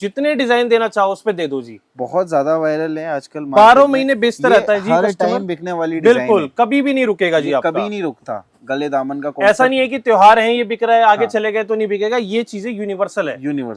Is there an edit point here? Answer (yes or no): no